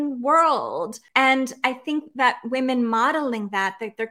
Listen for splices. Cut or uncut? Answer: cut